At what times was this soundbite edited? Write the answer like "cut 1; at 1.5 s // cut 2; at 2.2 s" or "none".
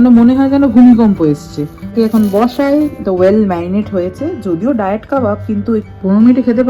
cut 1; at 1.9 s // cut 2; at 5.9 s